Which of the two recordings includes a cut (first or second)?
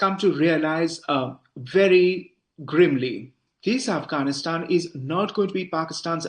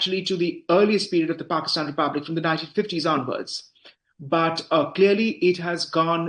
first